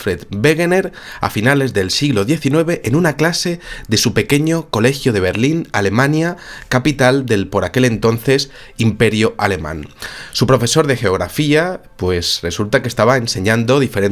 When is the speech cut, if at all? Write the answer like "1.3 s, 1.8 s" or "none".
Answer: none

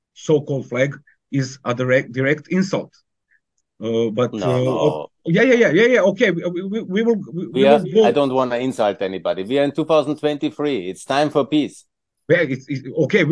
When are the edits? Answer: none

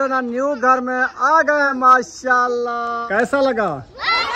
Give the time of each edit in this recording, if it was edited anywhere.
1.7 s, 3.0 s

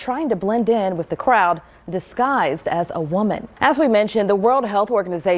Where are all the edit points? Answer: 3.5 s

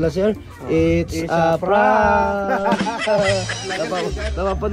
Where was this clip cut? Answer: none

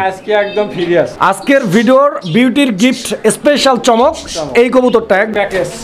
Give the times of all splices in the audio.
1.4 s, 5.1 s

